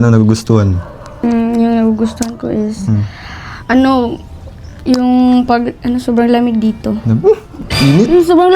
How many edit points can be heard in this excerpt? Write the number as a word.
one